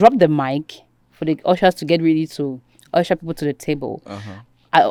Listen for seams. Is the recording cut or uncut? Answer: uncut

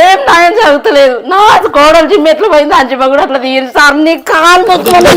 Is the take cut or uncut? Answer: uncut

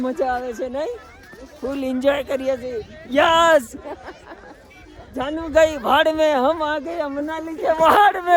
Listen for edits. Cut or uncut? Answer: uncut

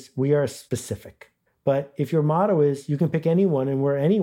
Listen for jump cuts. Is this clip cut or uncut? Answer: cut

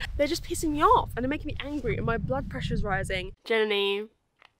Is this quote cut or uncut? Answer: cut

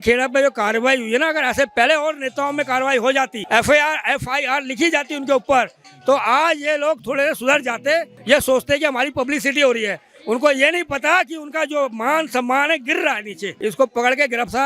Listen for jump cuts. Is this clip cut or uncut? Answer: cut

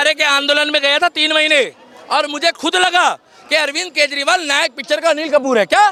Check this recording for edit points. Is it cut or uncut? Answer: uncut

